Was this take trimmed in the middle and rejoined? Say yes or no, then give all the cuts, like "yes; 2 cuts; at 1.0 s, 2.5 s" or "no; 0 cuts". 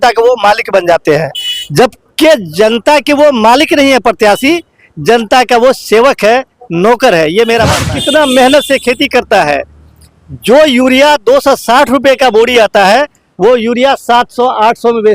yes; 1 cut; at 7.9 s